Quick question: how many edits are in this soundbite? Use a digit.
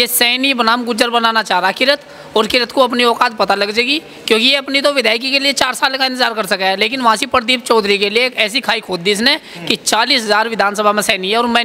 0